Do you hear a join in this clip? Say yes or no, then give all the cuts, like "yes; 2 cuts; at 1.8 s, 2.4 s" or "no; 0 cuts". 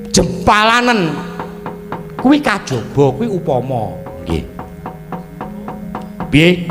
no; 0 cuts